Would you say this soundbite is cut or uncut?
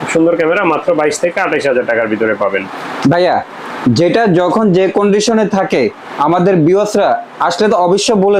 uncut